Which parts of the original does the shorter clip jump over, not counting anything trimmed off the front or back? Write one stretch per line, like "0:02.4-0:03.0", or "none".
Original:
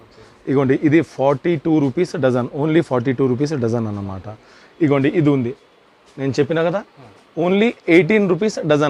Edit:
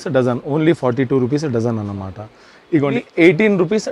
0:05.0-0:07.7